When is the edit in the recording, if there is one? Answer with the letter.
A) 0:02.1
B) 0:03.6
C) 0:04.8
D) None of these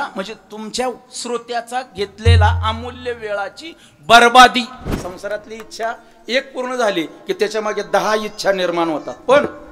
C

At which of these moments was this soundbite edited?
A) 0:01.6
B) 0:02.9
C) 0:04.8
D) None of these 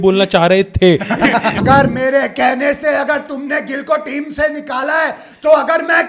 A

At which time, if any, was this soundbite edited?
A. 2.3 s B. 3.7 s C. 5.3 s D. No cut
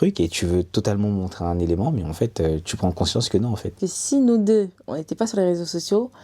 B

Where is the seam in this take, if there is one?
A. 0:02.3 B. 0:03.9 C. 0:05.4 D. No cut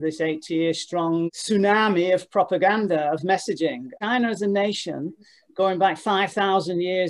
B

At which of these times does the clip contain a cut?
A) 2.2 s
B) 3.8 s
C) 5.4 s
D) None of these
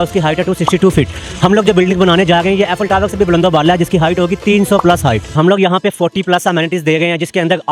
C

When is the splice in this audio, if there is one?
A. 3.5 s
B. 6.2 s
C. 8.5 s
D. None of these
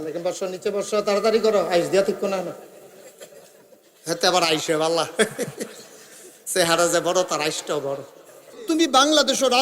C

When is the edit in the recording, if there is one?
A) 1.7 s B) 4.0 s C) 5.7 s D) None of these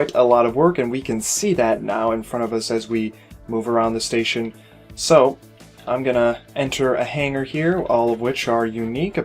C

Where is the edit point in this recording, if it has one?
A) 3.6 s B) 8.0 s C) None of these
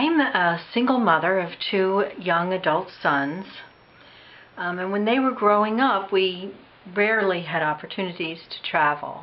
C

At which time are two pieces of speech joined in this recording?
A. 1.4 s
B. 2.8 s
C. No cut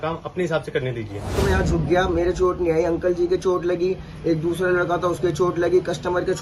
A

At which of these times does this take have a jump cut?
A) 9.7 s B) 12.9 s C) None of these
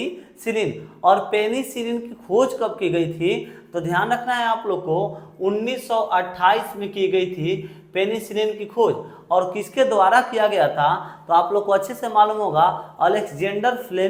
C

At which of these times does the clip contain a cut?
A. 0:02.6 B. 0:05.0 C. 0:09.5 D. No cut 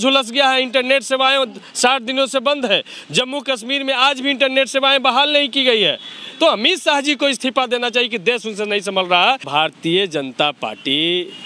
C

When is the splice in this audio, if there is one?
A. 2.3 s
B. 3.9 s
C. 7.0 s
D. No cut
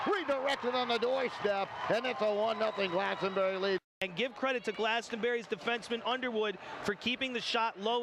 B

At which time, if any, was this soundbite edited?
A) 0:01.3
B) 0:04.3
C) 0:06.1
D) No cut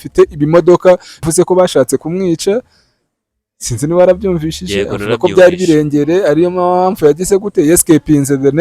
A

